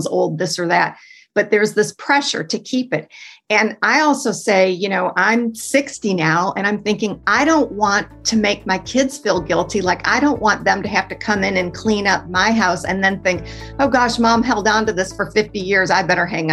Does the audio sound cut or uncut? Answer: uncut